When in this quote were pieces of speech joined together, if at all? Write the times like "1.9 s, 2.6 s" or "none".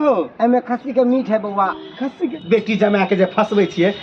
2.2 s